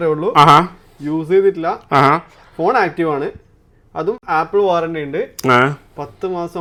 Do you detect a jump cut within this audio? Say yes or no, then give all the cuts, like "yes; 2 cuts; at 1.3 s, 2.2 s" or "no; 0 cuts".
no; 0 cuts